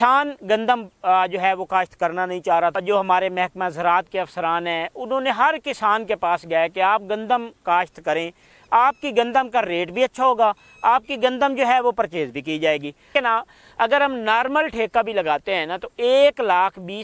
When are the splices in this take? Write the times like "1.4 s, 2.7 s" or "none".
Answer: 2.7 s, 13.1 s